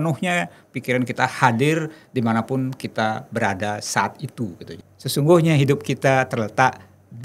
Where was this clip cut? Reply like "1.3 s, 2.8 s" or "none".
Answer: 4.7 s